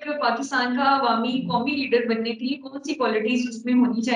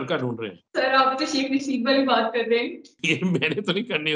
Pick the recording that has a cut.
second; 1 cut; at 2.9 s

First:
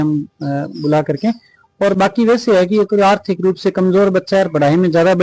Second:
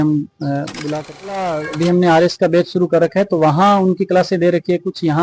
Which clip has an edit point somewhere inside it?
second; 1 cut; at 1.4 s

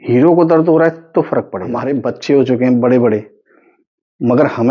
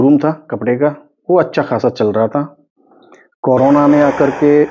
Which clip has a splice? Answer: first; 1 cut; at 1.8 s

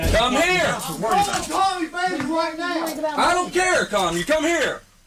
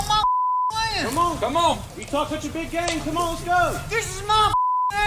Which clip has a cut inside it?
second; 1 cut; at 1.9 s

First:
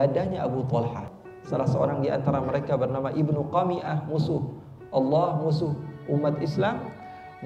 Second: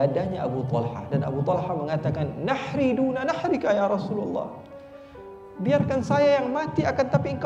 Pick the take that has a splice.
first; 1 cut; at 1.0 s

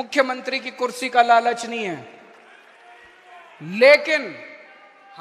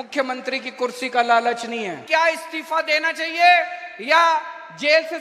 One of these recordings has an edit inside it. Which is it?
second; 1 cut; at 2.0 s

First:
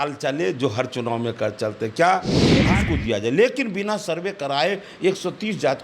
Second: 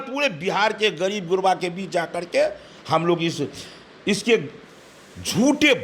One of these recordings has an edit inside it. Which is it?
first; 1 cut; at 2.7 s

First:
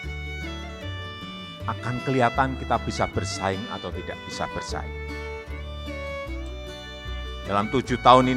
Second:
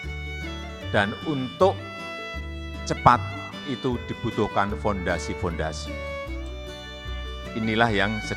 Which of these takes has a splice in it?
second; 3 cuts; at 0.9 s, 5.8 s, 7.4 s

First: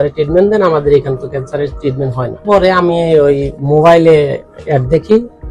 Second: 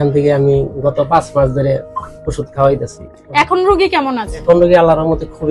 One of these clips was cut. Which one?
first; 1 cut; at 2.4 s

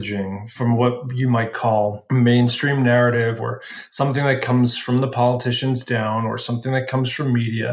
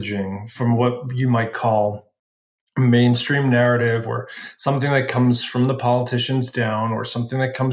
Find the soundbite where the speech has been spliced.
first; 1 cut; at 2.0 s

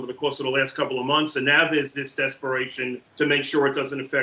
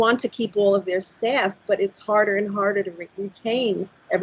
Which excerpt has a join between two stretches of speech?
first; 1 cut; at 3.1 s

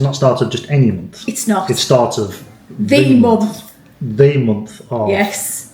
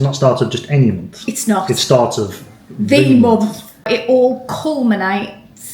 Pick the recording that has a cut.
second; 1 cut; at 3.9 s

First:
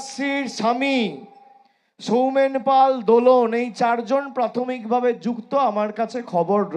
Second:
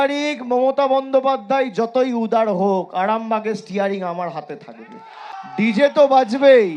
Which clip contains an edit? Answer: second; 1 cut; at 5.3 s

